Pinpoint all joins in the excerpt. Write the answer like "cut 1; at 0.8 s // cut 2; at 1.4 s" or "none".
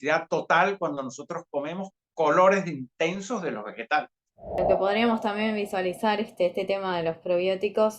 cut 1; at 4.6 s